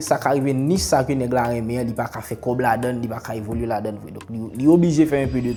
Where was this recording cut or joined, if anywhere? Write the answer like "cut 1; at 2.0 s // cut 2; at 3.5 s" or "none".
none